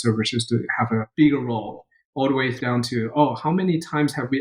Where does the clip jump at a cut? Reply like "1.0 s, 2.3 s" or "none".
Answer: 1.1 s, 2.6 s